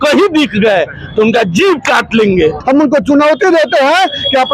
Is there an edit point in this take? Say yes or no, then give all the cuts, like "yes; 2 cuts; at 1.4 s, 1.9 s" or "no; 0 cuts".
yes; 1 cut; at 2.6 s